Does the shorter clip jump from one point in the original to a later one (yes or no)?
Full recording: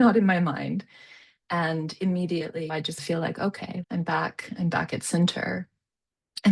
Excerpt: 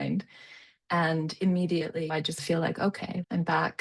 no